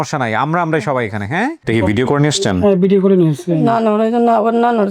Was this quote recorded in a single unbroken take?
no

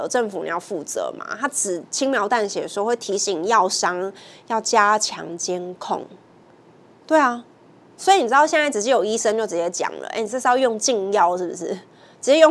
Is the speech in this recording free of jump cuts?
yes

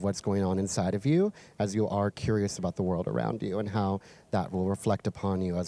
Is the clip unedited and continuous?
yes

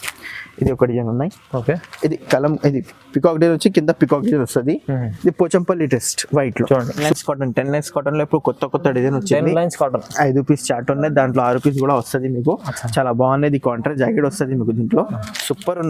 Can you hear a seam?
yes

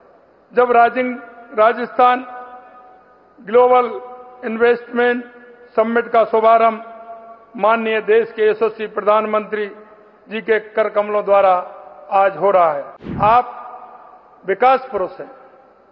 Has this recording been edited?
yes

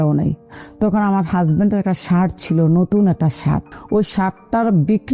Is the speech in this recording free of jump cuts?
no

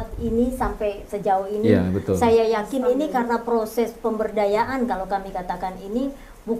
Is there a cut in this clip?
no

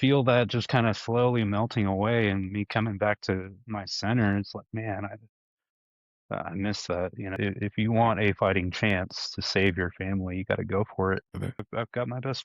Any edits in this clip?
yes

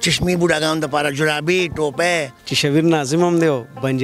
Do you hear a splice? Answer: yes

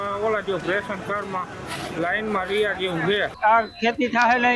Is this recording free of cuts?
no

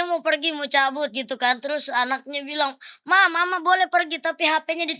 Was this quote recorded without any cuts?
yes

